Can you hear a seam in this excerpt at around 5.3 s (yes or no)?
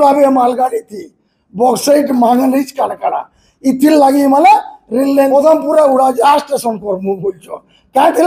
yes